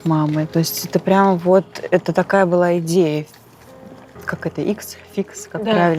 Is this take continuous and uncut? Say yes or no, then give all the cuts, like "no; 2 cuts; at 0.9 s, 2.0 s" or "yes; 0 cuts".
yes; 0 cuts